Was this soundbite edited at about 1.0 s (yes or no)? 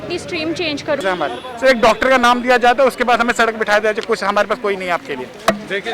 yes